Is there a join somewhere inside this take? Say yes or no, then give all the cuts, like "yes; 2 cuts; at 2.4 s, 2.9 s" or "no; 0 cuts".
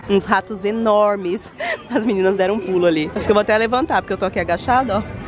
no; 0 cuts